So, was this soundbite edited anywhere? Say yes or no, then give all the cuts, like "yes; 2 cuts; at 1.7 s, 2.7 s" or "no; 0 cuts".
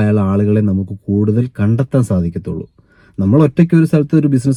no; 0 cuts